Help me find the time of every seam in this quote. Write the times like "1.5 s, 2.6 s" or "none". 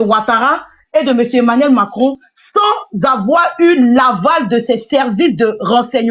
none